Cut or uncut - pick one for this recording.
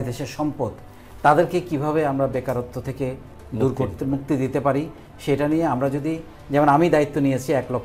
uncut